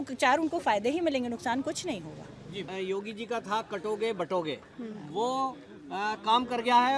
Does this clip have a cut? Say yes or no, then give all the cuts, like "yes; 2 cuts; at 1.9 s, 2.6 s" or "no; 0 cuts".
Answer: no; 0 cuts